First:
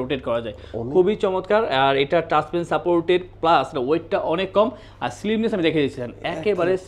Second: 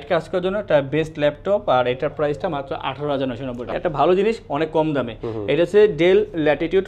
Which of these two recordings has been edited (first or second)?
second